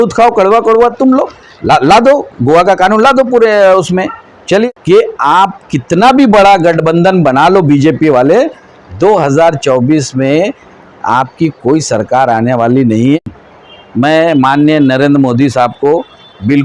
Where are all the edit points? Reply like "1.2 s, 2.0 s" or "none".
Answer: 4.7 s, 13.3 s